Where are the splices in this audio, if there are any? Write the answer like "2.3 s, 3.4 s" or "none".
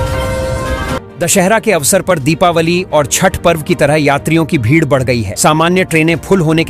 1.0 s